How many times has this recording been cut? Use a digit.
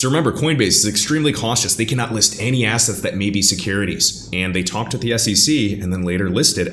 0